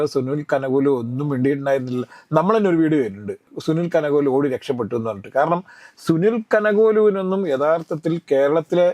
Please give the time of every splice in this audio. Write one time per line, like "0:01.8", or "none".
none